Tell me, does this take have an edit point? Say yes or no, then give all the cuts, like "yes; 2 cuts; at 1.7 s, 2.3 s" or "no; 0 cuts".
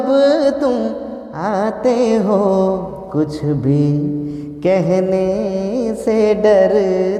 no; 0 cuts